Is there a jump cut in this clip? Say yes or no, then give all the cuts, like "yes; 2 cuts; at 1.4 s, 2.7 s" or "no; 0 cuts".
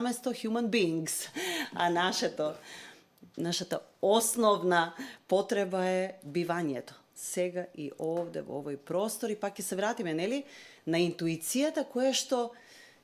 no; 0 cuts